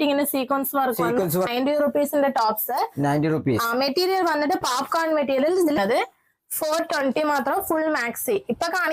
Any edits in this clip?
yes; 2 cuts; at 1.5 s, 5.8 s

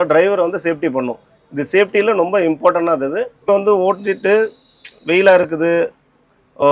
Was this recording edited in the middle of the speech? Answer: yes; 1 cut; at 3.5 s

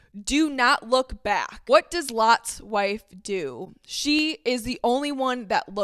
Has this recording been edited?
no; 0 cuts

